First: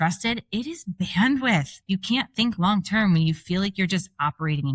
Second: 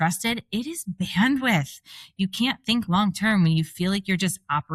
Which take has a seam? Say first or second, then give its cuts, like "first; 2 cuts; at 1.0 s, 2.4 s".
first; 1 cut; at 1.7 s